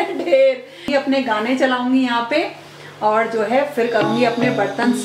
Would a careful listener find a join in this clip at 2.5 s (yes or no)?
no